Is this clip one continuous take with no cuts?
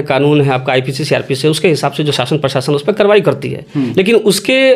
yes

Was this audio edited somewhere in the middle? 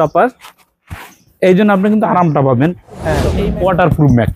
yes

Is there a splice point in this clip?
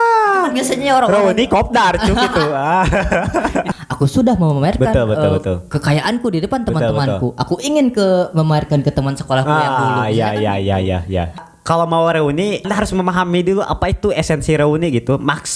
yes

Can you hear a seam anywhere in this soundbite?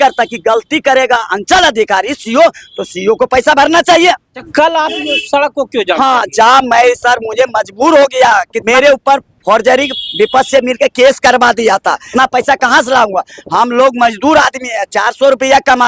yes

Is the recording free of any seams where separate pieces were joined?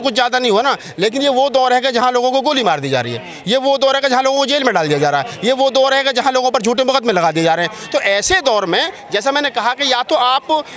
yes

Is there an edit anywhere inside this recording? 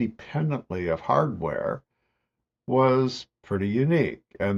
no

